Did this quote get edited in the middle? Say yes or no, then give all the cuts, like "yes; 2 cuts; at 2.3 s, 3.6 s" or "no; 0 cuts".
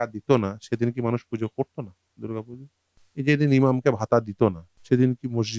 yes; 2 cuts; at 3.0 s, 4.7 s